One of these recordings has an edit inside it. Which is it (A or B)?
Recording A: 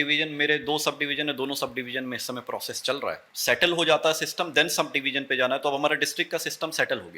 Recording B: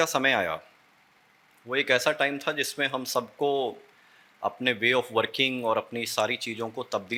A